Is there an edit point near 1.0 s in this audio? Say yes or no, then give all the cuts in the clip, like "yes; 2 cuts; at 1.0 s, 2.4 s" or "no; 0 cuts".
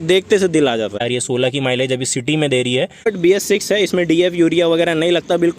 yes; 2 cuts; at 1.0 s, 3.0 s